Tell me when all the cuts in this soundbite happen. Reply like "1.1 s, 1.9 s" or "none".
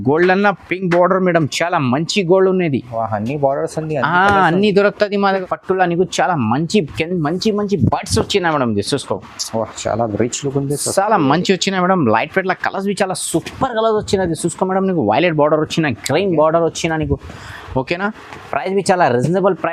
5.4 s